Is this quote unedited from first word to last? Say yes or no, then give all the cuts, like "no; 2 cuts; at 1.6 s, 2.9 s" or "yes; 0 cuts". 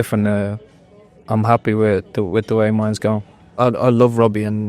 no; 1 cut; at 3.4 s